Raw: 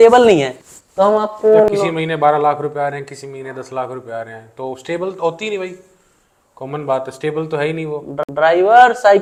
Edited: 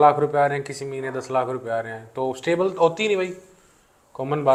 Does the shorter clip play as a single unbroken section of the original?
yes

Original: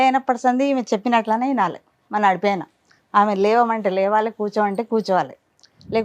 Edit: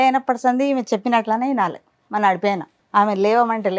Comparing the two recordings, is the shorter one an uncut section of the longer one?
no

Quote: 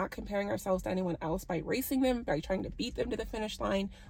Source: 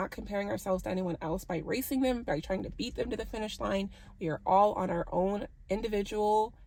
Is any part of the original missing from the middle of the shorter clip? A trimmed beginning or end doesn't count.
no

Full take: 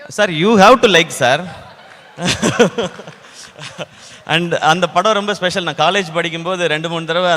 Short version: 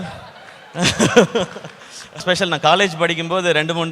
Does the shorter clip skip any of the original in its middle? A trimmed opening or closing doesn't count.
yes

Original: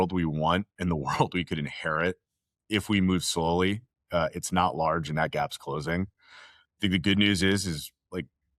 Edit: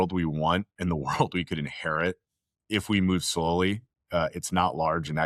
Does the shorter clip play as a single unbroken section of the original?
yes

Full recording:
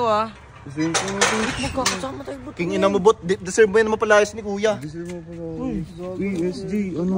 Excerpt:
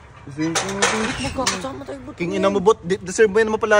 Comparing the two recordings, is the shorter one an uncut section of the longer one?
yes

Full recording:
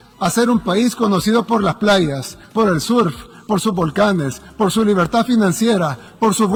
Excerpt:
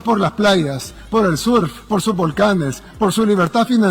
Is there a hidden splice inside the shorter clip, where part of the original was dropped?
yes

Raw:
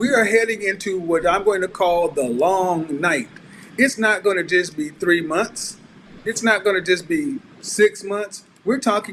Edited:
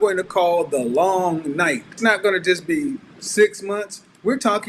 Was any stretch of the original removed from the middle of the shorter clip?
yes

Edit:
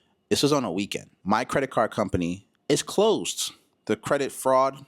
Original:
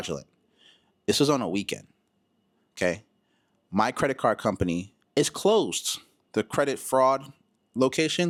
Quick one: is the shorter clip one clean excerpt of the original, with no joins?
no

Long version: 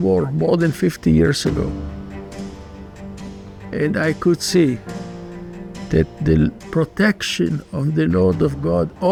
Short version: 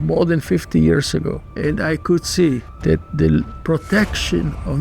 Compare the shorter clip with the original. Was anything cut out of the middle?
yes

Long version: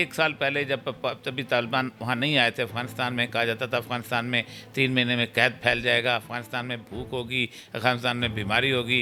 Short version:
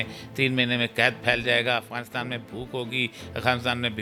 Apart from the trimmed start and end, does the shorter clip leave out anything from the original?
no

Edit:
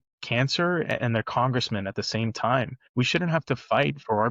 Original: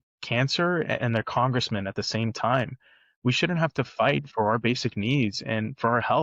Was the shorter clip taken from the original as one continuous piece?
no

